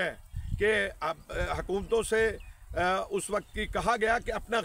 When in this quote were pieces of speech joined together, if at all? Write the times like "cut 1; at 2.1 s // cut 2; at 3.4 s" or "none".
none

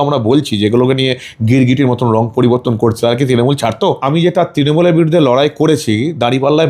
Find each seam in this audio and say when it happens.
cut 1; at 4.0 s

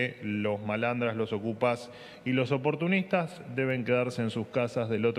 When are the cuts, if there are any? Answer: none

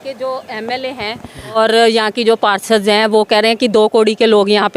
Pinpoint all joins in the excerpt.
cut 1; at 1.6 s

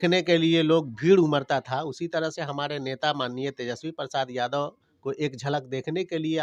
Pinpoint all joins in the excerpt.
none

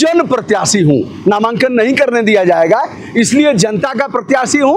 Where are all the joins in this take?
none

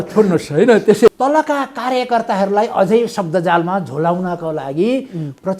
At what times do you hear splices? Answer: cut 1; at 1.1 s

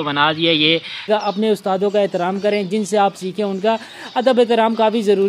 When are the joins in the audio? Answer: cut 1; at 1.1 s

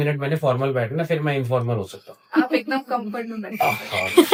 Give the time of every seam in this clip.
none

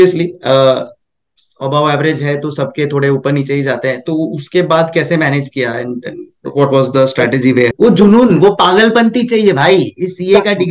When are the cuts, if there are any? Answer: cut 1; at 7.7 s

